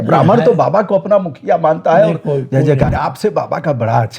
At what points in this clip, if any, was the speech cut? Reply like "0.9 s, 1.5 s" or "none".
2.9 s